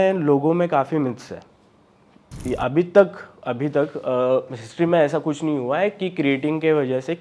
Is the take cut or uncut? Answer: cut